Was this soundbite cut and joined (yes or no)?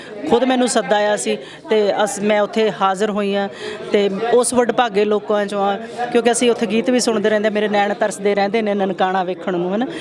no